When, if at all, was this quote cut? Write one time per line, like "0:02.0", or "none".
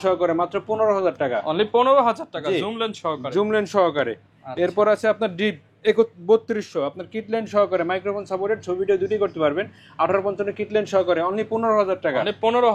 none